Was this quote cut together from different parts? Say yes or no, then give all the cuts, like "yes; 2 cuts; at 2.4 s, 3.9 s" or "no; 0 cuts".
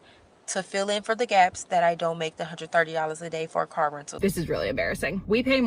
yes; 2 cuts; at 2.6 s, 4.1 s